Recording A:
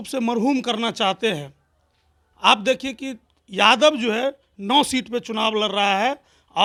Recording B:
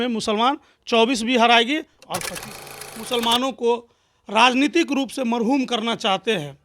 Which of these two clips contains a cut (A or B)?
B